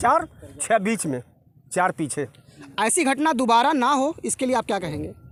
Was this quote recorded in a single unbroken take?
yes; 0 cuts

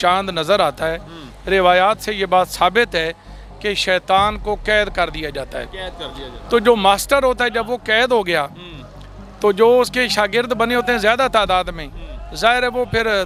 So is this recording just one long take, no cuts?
yes; 0 cuts

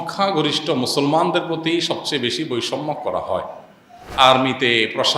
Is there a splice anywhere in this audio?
yes; 1 cut; at 4.1 s

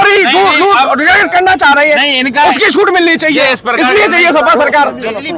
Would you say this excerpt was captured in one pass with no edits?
yes; 0 cuts

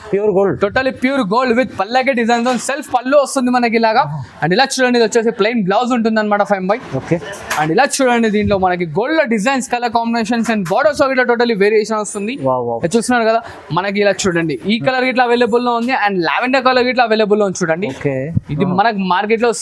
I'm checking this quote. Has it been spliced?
no; 0 cuts

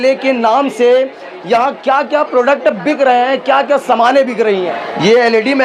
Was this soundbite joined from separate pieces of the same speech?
yes; 1 cut; at 4.7 s

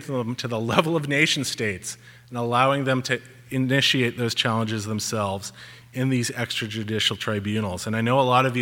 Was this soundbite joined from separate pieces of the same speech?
no; 0 cuts

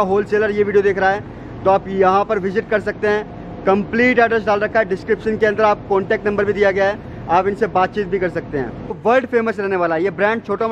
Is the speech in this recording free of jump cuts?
no; 1 cut; at 9.0 s

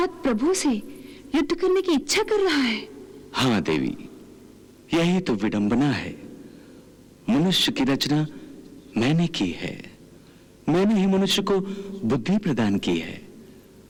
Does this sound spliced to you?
no; 0 cuts

